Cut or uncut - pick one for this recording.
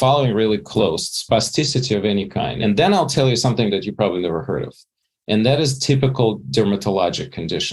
cut